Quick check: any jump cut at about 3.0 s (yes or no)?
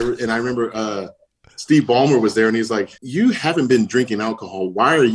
yes